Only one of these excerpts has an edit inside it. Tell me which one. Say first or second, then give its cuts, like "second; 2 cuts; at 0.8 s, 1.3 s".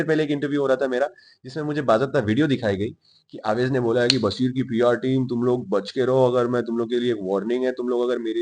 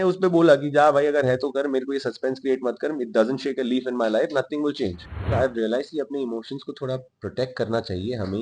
second; 1 cut; at 5.3 s